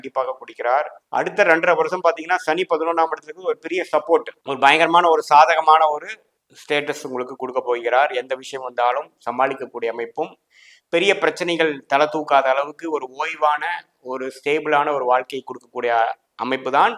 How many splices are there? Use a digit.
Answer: 0